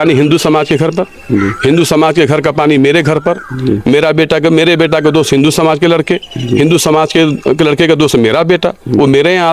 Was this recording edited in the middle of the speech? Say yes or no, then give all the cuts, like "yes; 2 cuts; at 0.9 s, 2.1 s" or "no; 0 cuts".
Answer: no; 0 cuts